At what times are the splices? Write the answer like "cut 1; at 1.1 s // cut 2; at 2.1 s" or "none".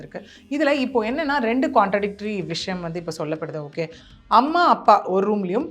cut 1; at 4.0 s